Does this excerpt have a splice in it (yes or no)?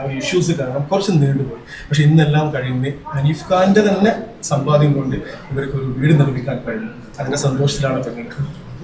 no